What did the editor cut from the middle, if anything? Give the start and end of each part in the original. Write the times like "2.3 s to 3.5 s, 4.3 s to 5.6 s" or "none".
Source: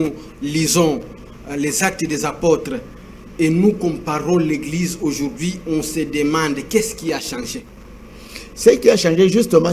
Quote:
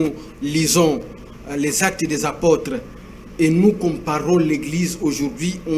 none